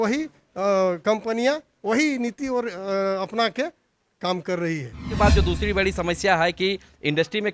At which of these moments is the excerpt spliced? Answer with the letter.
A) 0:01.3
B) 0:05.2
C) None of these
B